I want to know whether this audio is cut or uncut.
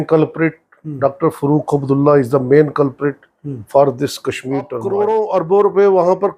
cut